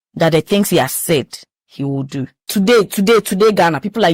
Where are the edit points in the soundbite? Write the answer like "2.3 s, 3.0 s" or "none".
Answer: 2.4 s